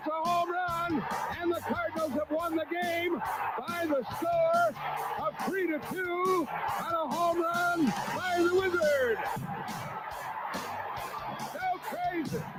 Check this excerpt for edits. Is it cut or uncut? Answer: uncut